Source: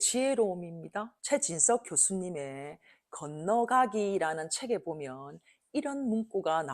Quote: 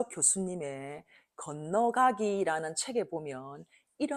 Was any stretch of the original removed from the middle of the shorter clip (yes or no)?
no